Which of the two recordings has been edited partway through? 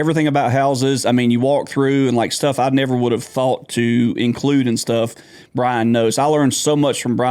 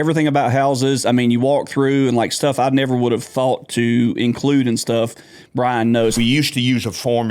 second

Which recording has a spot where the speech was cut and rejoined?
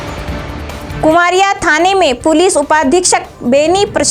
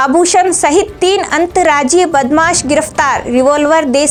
first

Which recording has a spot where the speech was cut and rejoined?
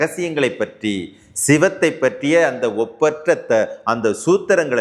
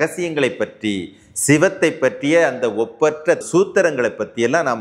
second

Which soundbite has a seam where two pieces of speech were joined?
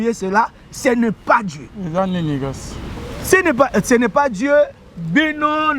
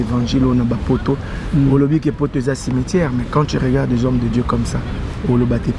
first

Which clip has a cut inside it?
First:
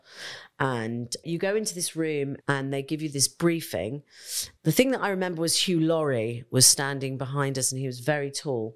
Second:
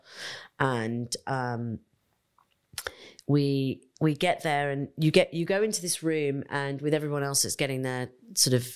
first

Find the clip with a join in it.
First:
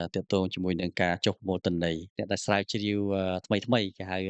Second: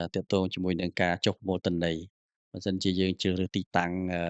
first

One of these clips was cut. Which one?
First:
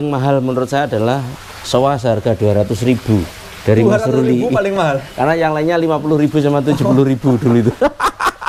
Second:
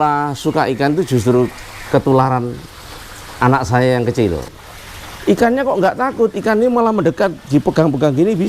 second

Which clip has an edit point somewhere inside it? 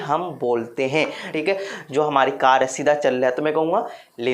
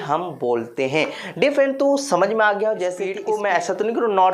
first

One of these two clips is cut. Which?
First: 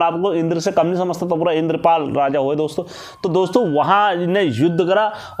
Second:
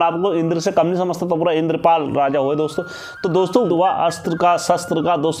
second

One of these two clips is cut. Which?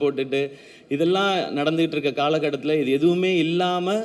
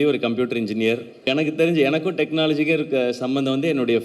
second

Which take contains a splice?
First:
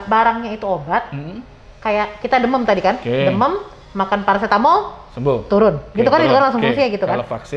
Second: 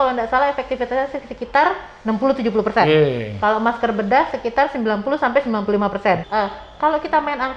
second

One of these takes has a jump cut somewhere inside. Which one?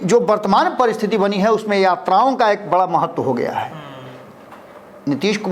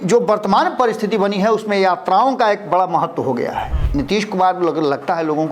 second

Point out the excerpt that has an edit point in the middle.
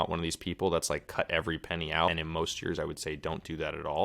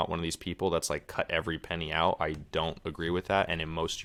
first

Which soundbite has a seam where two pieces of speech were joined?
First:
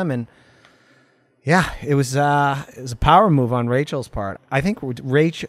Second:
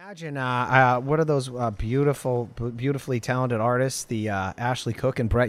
first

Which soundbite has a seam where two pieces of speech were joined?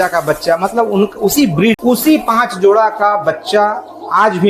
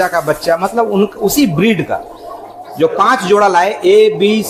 first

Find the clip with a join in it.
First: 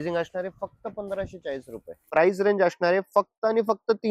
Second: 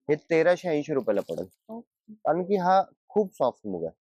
first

